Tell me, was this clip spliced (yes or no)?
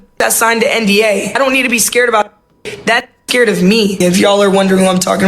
yes